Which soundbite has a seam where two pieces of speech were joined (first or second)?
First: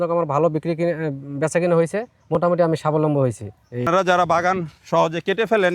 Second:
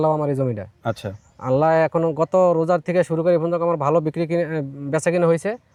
first